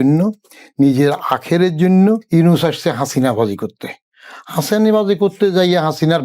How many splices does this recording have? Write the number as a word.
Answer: one